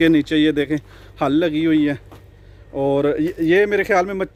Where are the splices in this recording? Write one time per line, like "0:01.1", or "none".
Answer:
none